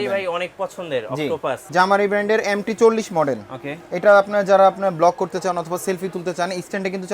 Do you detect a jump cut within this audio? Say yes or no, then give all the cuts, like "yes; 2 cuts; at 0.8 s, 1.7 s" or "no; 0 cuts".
yes; 1 cut; at 1.6 s